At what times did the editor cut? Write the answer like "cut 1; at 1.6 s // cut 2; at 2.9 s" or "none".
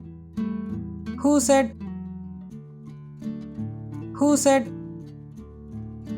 none